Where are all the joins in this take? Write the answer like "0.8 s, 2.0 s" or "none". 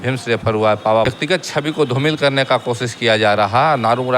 1.1 s